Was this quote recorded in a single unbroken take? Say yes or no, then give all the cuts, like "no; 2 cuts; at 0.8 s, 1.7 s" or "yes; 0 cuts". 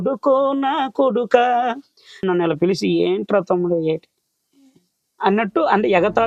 no; 1 cut; at 2.2 s